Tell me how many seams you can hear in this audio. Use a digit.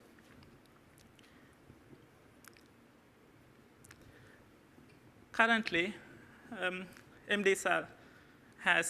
1